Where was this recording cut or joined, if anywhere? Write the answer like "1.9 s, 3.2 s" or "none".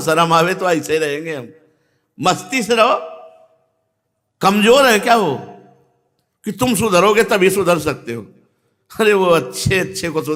none